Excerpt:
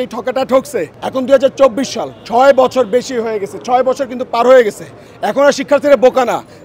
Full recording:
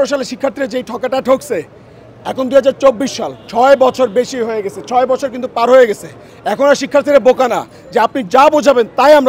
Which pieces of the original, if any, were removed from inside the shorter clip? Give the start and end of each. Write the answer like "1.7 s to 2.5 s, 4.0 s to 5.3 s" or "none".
1.7 s to 2.2 s